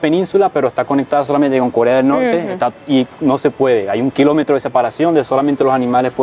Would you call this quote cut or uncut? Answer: uncut